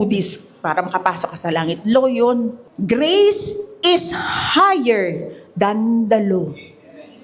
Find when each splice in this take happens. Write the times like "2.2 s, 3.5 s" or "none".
2.7 s